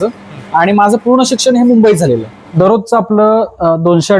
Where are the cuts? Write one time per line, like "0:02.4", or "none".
0:02.6